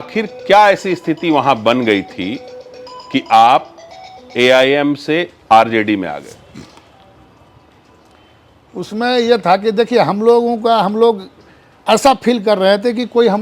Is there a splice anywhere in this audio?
no; 0 cuts

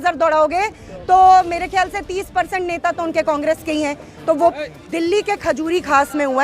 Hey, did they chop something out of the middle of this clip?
yes; 1 cut; at 4.5 s

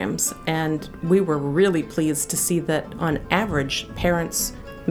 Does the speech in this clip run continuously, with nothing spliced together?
yes; 0 cuts

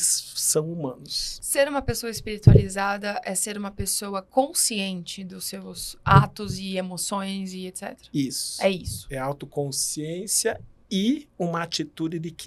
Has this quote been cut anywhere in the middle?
no; 0 cuts

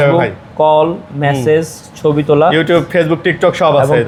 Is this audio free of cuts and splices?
yes; 0 cuts

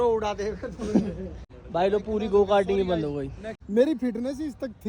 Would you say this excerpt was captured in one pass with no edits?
no; 2 cuts; at 1.4 s, 3.6 s

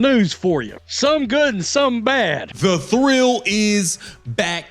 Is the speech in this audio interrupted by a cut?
yes; 1 cut; at 2.6 s

